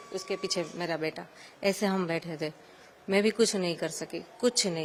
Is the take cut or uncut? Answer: uncut